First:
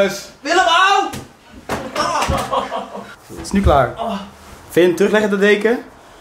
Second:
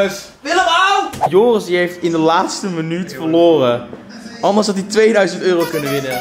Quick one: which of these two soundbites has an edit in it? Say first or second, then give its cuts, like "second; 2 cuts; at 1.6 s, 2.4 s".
second; 1 cut; at 1.2 s